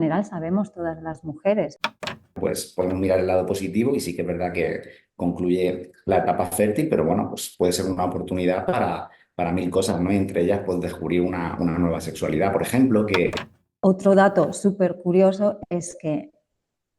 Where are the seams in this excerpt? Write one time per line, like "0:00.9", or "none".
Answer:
0:02.4
0:13.4